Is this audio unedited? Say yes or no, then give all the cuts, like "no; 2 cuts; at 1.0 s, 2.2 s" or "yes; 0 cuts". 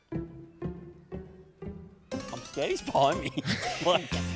yes; 0 cuts